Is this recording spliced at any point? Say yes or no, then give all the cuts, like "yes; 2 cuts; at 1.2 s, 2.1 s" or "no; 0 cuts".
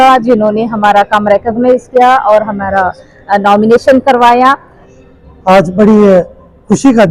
yes; 1 cut; at 4.8 s